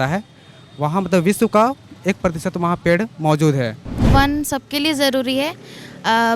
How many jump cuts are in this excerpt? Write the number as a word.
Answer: one